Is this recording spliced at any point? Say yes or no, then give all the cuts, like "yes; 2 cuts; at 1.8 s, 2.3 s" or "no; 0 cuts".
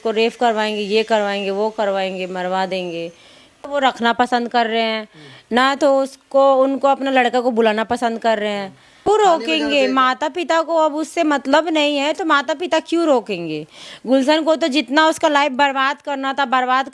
yes; 2 cuts; at 3.6 s, 9.1 s